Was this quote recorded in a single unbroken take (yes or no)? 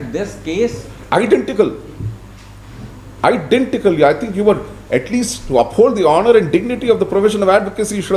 yes